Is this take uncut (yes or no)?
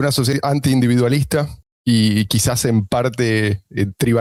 yes